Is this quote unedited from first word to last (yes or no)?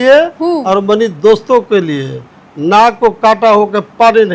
yes